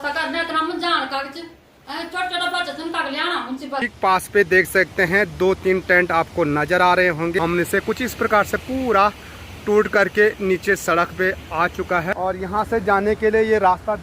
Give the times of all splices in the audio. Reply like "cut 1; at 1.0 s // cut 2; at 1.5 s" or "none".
cut 1; at 3.9 s // cut 2; at 7.4 s // cut 3; at 12.1 s